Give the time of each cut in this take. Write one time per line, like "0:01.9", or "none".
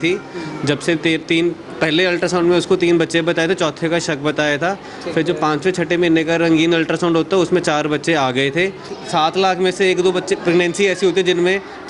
0:09.0